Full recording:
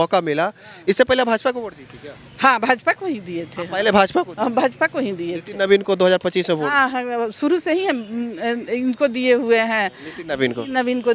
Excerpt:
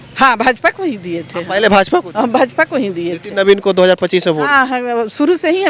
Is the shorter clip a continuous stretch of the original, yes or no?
yes